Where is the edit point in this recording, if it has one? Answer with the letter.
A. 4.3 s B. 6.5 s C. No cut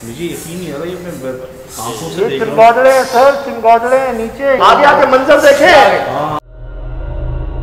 C